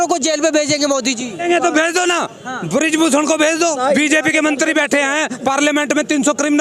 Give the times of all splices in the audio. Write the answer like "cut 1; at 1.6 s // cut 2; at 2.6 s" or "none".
cut 1; at 1.4 s // cut 2; at 3.8 s